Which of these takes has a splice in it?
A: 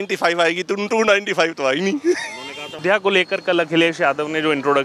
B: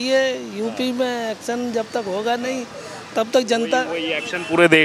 A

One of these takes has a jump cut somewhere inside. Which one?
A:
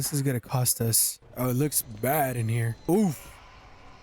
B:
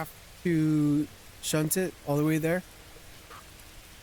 A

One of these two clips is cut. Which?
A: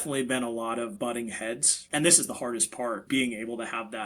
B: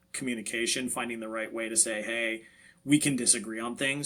A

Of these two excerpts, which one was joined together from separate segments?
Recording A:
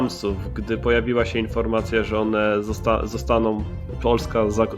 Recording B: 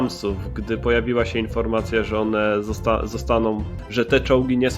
B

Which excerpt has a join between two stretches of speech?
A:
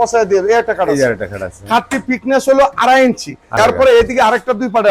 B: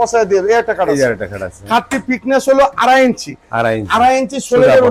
A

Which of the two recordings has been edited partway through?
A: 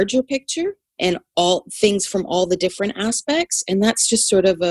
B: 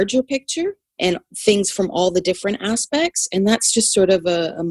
B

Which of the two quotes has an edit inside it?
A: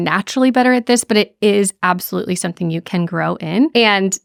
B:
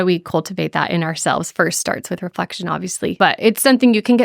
B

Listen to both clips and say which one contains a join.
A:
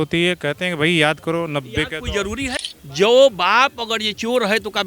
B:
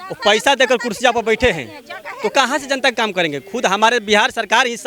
A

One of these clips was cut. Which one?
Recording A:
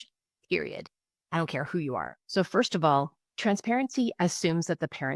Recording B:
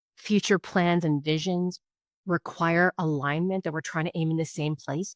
A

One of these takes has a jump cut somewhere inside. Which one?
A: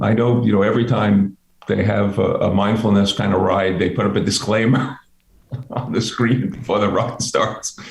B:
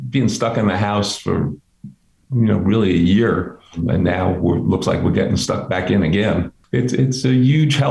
B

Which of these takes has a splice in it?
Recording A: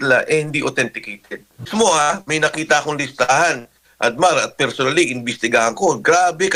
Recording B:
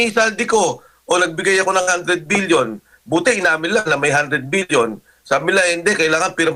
A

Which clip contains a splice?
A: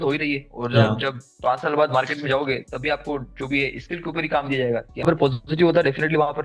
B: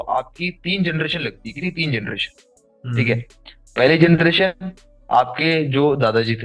A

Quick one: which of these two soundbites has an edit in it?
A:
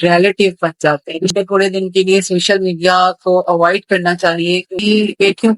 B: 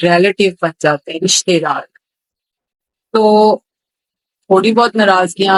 A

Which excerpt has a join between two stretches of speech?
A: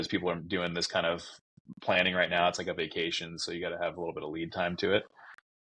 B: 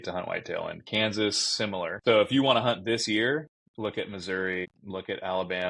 B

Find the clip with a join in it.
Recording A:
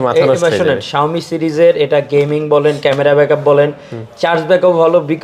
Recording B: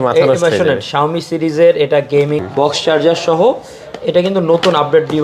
B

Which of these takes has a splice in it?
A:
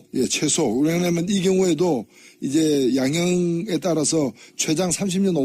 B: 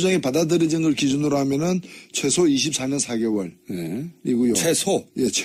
A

